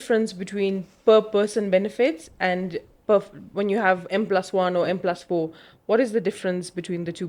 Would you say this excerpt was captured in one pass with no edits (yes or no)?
yes